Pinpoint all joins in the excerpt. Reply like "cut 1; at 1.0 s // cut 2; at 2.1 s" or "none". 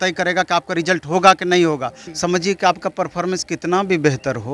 cut 1; at 2.0 s